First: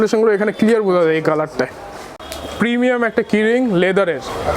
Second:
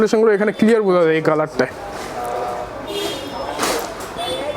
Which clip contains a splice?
first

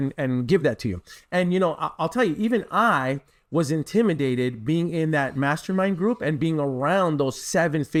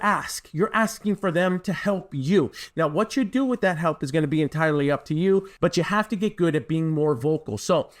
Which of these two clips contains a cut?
second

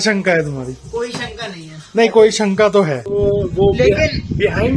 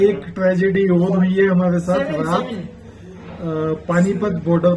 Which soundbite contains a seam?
first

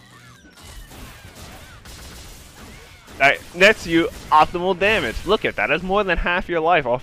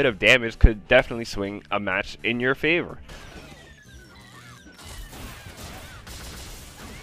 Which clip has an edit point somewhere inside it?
second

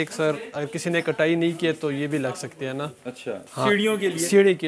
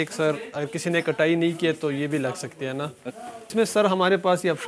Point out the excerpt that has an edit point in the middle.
second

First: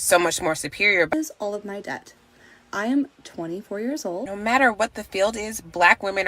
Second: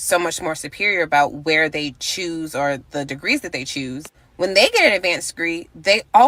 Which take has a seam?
first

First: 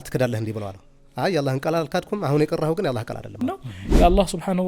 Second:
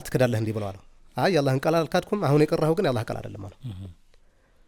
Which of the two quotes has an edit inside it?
first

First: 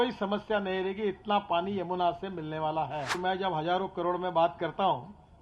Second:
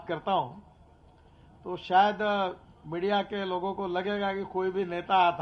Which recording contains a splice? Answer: first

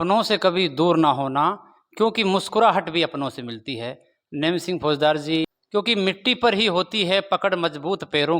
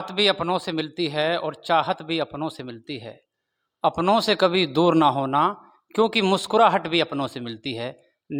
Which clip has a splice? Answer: first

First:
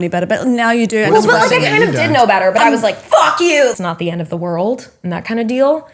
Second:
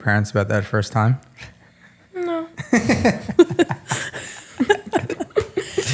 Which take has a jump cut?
first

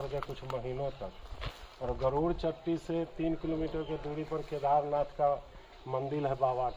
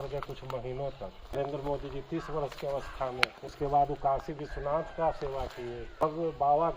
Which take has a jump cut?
second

